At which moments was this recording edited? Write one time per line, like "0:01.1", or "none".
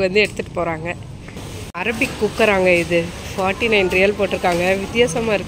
0:01.4